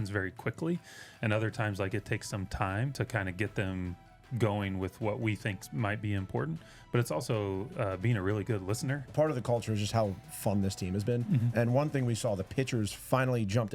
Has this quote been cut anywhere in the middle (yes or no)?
yes